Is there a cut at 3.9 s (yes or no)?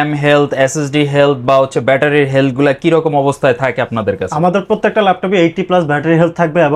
no